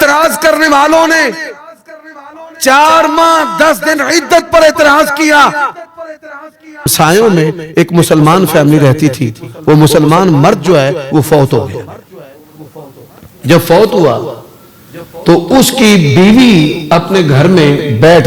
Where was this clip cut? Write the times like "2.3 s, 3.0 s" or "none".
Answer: 6.9 s